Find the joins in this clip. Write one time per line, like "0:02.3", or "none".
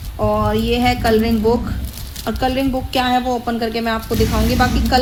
none

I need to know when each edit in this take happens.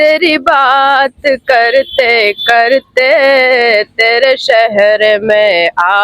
none

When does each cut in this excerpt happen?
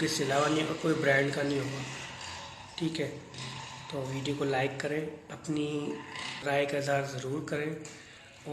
0:06.4

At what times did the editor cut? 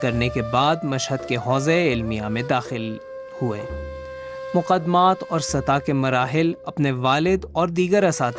0:07.5

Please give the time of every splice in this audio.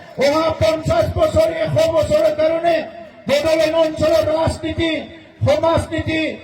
none

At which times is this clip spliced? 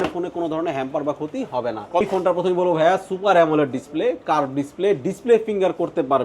0:02.0

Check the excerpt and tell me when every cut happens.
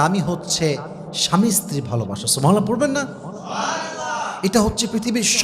none

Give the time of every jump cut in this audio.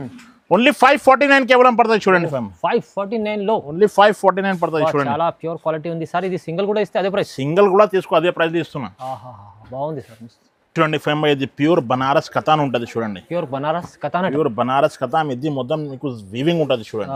none

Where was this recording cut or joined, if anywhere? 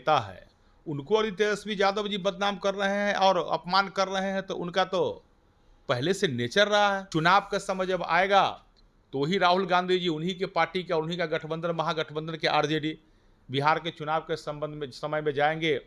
0:07.0

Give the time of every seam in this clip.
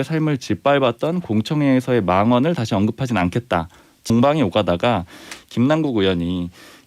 0:04.0

